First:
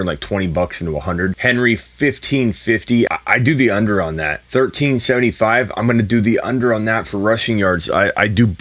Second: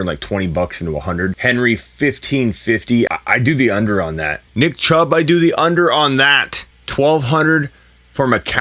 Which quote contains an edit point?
second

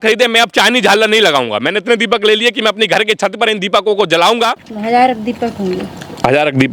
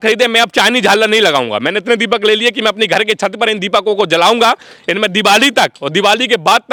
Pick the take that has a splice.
first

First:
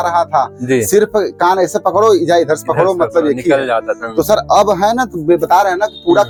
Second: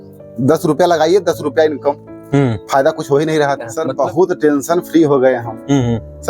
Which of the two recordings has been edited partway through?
second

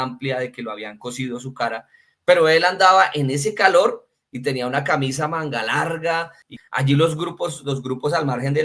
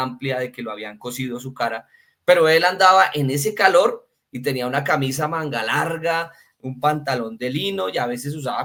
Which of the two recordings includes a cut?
first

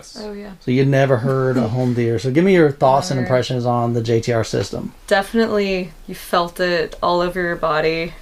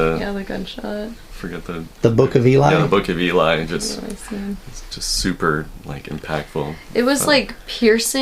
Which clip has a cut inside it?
first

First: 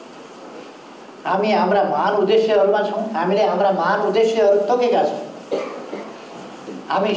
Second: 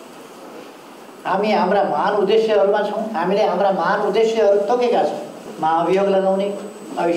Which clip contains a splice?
second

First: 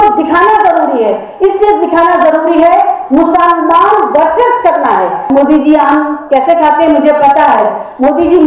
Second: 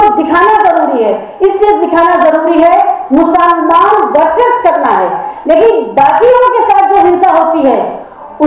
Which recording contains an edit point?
first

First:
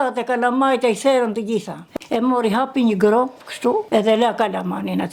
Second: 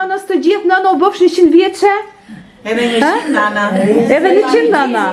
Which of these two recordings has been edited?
first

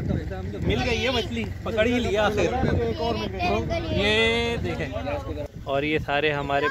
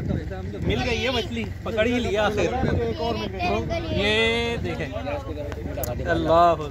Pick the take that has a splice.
first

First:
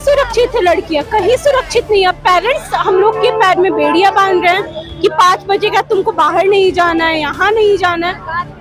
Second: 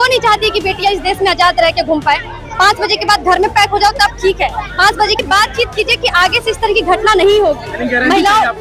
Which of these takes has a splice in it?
second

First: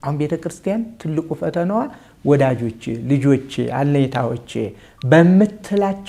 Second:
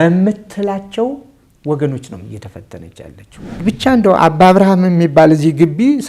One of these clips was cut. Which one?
second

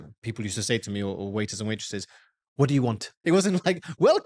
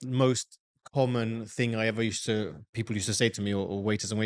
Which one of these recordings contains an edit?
first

